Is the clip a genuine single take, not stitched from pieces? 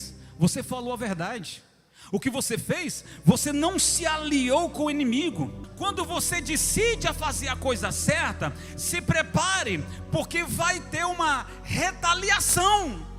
no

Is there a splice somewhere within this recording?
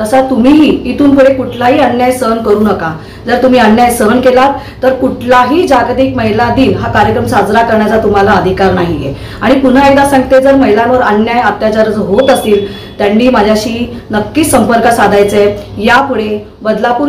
no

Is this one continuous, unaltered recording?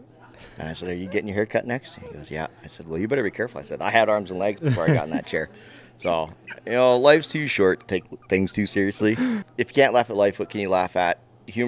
no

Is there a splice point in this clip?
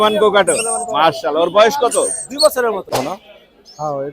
yes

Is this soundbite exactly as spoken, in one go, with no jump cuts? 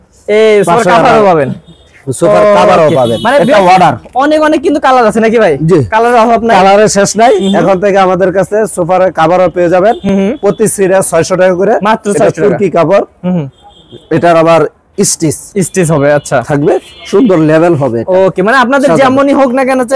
yes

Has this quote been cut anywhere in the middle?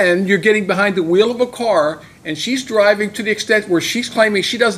no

